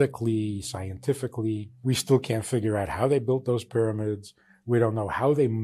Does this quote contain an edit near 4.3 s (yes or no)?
no